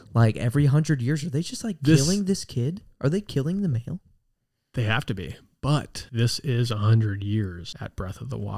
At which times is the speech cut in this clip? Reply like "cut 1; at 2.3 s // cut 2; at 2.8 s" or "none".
cut 1; at 6.0 s // cut 2; at 7.7 s

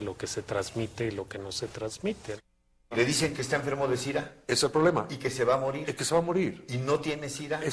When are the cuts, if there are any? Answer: cut 1; at 2.9 s

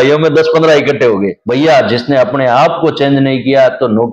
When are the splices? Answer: cut 1; at 1.4 s

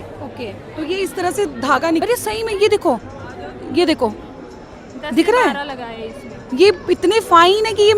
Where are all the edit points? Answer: cut 1; at 2.0 s

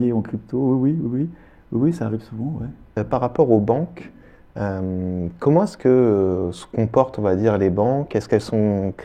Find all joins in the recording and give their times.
cut 1; at 2.9 s

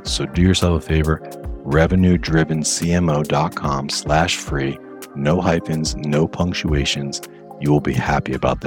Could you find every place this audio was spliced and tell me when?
none

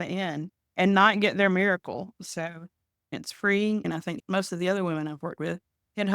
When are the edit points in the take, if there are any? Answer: cut 1; at 3.1 s // cut 2; at 4.1 s

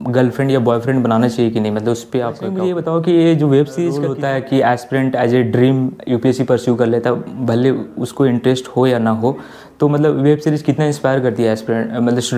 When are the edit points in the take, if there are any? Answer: cut 1; at 2.6 s // cut 2; at 4.1 s

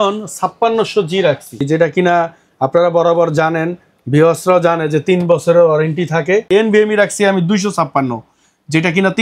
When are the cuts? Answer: cut 1; at 1.7 s // cut 2; at 6.5 s

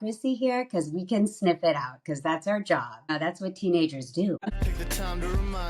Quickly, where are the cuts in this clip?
cut 1; at 3.1 s // cut 2; at 4.4 s

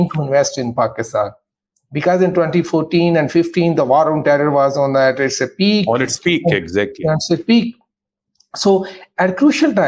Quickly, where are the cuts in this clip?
none

